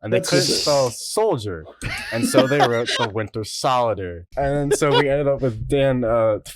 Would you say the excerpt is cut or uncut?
cut